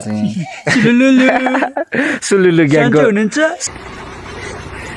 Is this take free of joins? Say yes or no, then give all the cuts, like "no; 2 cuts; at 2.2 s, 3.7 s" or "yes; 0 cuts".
no; 2 cuts; at 1.8 s, 3.6 s